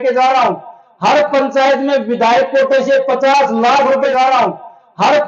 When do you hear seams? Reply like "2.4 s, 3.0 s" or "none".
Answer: none